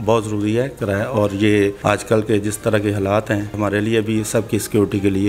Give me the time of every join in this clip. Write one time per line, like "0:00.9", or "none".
0:01.8
0:03.6